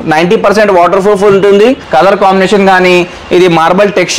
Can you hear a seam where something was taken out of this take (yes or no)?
yes